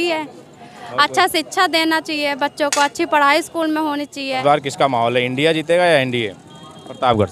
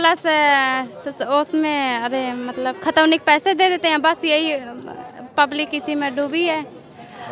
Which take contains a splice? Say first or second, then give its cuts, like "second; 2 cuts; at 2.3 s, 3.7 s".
first; 1 cut; at 4.4 s